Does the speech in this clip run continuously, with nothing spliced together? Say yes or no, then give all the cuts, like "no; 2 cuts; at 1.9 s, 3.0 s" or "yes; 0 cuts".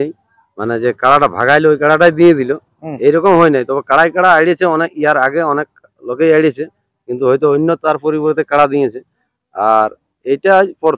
yes; 0 cuts